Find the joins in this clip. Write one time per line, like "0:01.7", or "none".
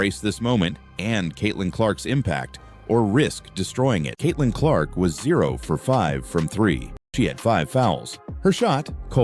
0:04.1
0:07.0